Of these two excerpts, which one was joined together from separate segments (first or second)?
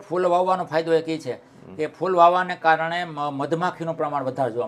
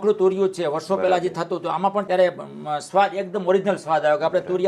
second